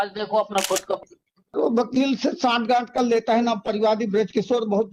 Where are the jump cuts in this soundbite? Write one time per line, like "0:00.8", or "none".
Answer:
0:01.0